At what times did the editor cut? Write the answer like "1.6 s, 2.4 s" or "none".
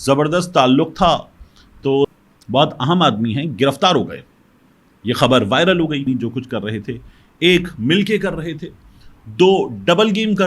2.1 s, 6.0 s